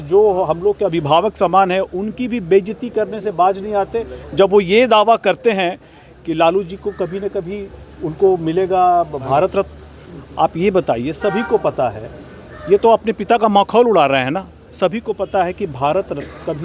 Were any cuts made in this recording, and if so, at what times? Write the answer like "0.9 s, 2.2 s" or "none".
none